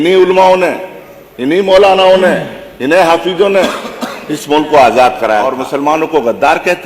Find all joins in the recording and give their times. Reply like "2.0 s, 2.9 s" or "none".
5.6 s

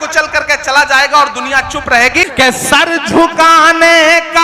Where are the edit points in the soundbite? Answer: 2.3 s

